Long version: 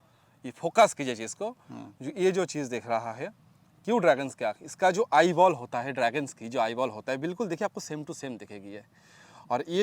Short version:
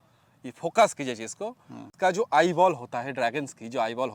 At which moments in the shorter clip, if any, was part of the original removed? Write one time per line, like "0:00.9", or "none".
0:01.8

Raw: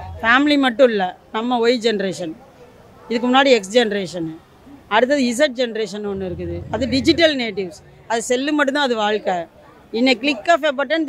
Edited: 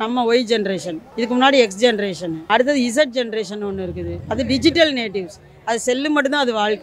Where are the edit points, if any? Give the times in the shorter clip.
0:01.0
0:02.3

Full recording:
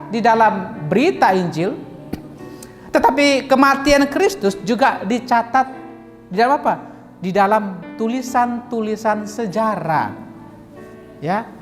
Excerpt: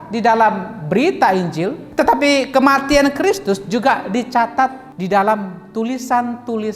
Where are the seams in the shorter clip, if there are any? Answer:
0:01.8
0:04.9

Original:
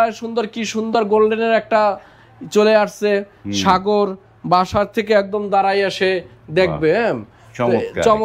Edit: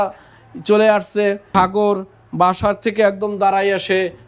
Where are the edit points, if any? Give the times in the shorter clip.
0:01.4

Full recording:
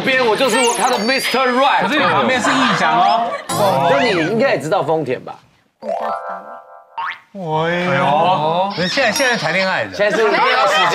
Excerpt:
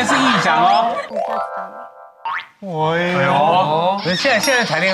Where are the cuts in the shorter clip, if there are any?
0:01.0

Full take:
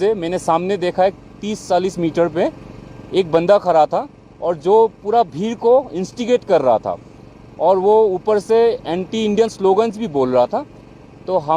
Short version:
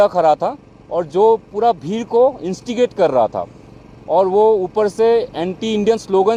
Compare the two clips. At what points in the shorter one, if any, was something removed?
none

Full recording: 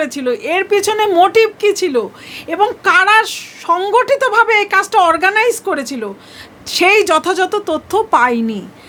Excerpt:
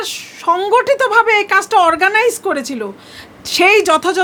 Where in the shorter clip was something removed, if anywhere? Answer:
none

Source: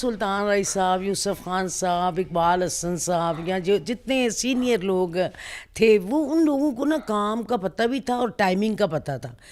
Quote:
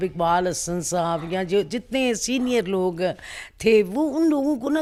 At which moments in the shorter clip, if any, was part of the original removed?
none

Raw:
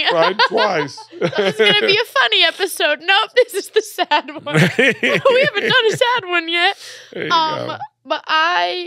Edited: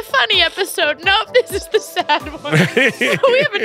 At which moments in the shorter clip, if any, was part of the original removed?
none

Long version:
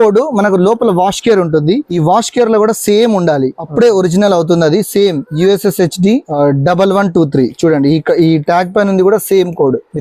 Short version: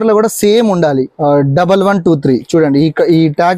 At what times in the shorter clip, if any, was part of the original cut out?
0:01.2

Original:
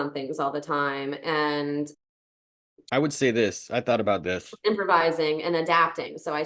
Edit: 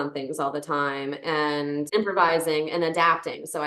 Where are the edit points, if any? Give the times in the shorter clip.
0:01.9

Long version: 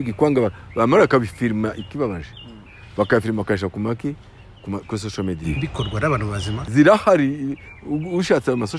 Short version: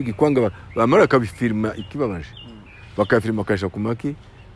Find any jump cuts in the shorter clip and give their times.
none

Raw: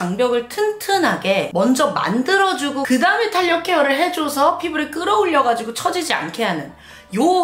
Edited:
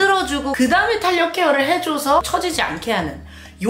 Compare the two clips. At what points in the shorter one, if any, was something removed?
0:02.3

